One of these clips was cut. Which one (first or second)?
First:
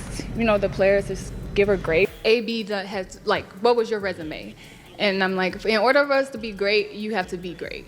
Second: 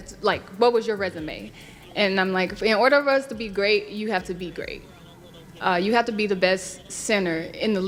first